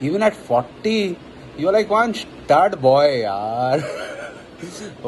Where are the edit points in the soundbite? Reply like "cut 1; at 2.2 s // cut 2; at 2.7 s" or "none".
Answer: none